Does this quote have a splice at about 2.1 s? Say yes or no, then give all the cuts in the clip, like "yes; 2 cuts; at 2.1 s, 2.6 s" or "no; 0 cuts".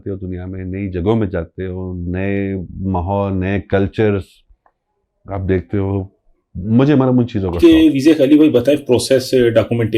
no; 1 cut; at 7.6 s